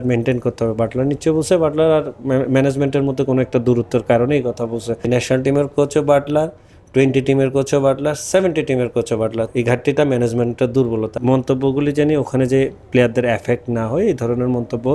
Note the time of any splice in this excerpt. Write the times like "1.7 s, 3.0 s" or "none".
5.1 s, 9.5 s, 11.2 s